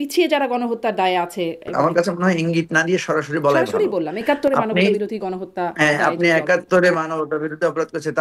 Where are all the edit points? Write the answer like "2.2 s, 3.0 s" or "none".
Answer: 1.7 s